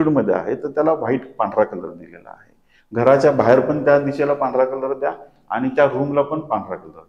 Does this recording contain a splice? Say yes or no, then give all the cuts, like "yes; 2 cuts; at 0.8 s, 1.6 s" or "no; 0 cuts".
no; 0 cuts